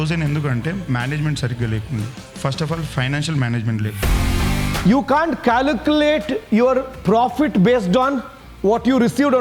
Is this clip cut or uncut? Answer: cut